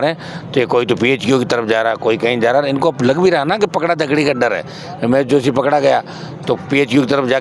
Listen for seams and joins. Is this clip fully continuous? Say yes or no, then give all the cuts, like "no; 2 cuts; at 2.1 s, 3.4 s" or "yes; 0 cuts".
yes; 0 cuts